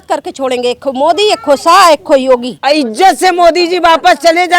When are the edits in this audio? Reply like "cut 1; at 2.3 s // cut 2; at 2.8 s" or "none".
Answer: cut 1; at 2.5 s